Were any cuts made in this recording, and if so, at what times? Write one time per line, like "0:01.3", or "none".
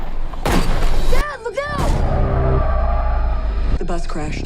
0:01.0
0:03.6